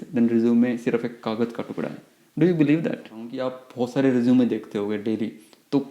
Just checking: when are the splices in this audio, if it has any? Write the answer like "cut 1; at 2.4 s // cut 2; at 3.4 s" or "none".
cut 1; at 3.3 s